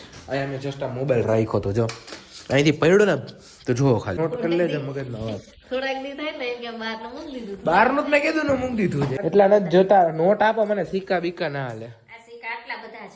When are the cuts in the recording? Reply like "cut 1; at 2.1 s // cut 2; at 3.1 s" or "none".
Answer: cut 1; at 4.2 s // cut 2; at 9.1 s